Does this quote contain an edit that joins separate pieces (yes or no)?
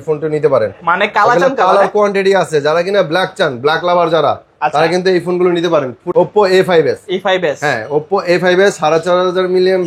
yes